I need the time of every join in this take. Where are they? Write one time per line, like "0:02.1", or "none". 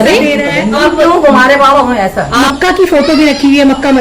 0:00.8
0:02.4